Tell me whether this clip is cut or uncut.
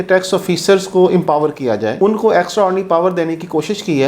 uncut